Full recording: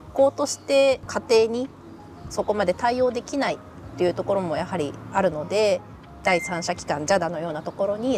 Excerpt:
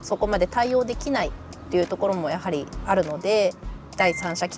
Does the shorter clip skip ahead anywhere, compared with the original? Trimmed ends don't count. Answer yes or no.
no